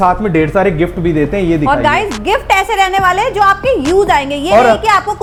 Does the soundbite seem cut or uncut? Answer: uncut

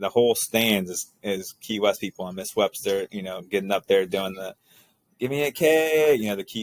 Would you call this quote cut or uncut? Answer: uncut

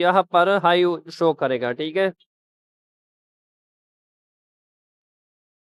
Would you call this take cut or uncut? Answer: uncut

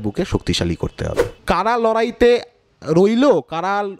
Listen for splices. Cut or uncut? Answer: cut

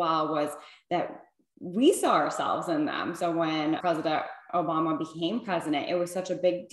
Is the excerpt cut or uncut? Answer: cut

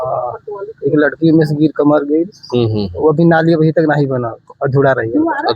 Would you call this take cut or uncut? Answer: uncut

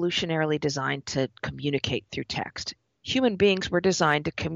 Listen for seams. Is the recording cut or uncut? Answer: cut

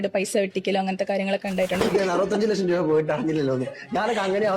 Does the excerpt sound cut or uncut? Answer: cut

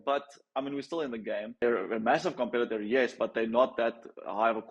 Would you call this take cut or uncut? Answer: cut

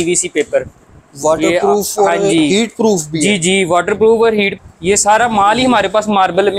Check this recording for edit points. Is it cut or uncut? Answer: cut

